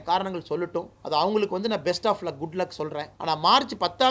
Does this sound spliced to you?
yes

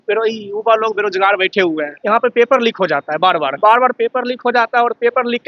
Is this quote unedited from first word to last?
no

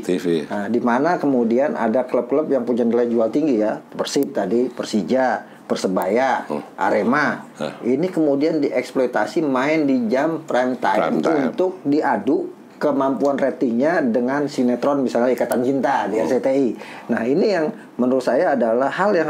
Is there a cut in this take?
no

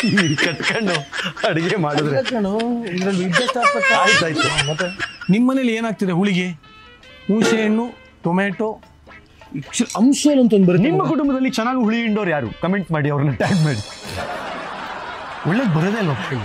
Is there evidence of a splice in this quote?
yes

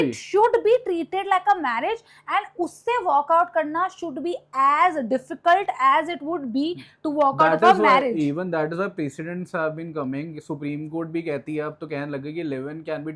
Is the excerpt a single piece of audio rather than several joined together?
yes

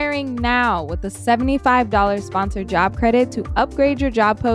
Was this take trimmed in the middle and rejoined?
no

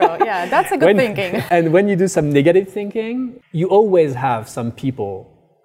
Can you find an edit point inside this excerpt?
yes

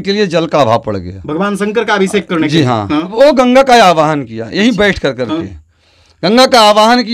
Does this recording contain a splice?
yes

